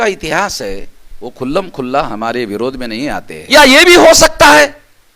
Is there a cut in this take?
yes; 1 cut; at 3.3 s

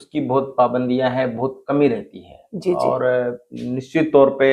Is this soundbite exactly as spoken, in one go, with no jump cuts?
yes; 0 cuts

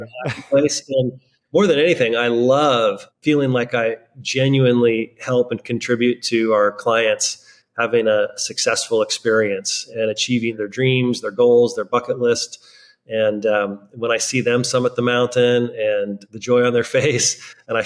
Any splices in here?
no; 0 cuts

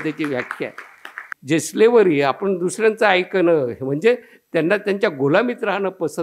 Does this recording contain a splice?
yes; 1 cut; at 1.3 s

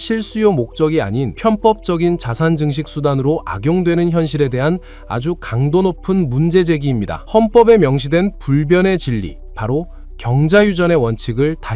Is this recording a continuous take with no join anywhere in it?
no; 2 cuts; at 1.3 s, 7.1 s

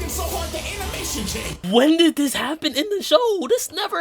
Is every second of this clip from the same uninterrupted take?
no; 1 cut; at 1.6 s

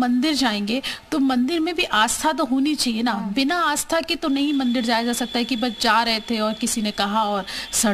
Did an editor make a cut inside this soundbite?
no; 0 cuts

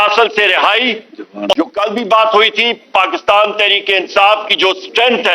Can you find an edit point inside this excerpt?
yes; 1 cut; at 1.5 s

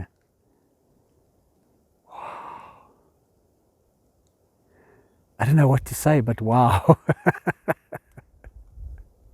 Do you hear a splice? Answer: no; 0 cuts

